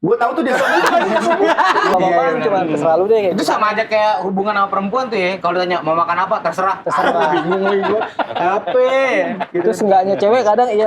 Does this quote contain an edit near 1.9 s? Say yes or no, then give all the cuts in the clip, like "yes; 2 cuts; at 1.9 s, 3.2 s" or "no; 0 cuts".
yes; 1 cut; at 1.9 s